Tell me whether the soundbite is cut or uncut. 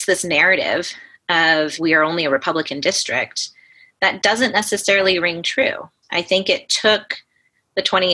cut